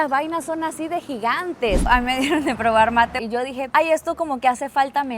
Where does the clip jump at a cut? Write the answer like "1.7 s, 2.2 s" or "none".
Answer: 1.8 s, 3.2 s